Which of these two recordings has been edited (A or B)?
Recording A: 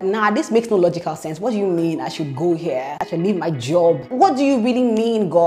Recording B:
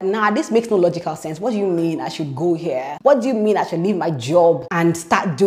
A